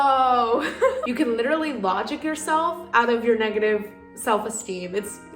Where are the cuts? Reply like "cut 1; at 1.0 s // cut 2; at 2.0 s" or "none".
cut 1; at 1.0 s